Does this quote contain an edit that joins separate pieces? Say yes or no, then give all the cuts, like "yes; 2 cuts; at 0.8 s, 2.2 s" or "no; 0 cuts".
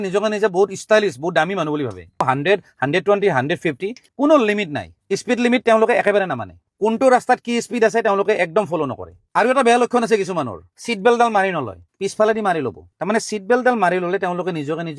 no; 0 cuts